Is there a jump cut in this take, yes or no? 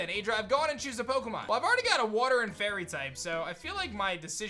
yes